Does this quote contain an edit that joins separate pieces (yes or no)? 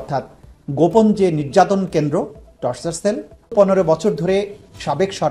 yes